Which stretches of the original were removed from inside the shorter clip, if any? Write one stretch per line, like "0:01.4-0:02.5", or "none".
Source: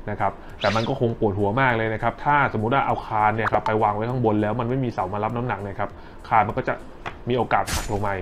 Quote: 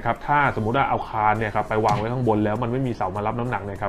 none

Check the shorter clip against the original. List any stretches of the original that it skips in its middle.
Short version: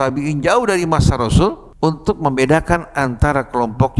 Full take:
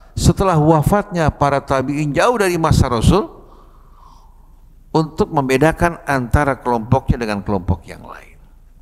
0:03.4-0:04.8

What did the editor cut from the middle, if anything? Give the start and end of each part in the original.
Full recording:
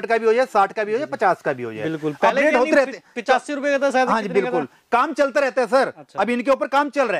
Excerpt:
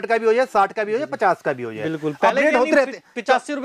none

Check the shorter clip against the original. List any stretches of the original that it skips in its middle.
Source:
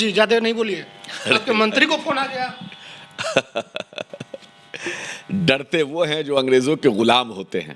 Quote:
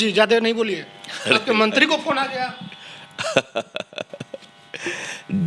none

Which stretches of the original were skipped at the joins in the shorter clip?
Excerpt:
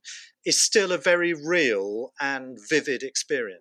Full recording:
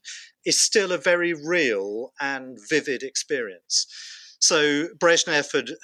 none

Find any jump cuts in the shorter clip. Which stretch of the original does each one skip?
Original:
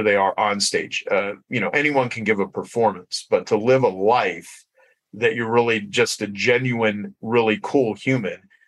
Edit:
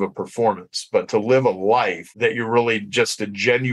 0:04.4-0:05.1

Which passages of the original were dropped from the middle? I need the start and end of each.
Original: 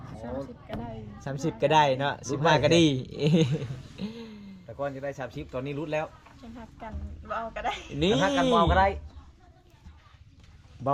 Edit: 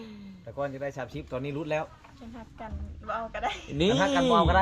none

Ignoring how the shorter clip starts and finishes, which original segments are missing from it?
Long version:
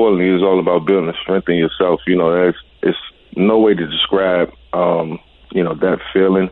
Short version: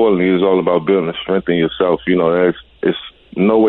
none

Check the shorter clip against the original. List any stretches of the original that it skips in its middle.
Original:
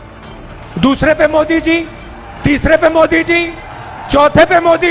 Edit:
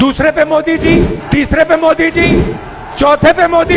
0:02.0-0:02.3

